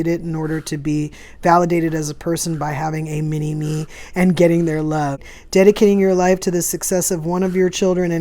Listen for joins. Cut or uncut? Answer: cut